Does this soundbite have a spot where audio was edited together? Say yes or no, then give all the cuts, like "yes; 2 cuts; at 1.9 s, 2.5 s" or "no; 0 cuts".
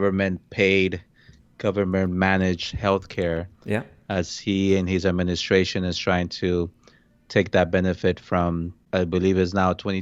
yes; 1 cut; at 8.7 s